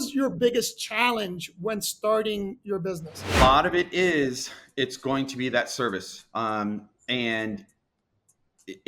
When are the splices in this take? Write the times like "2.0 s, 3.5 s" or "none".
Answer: 3.4 s